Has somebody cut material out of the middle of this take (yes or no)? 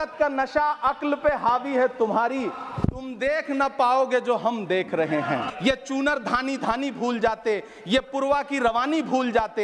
yes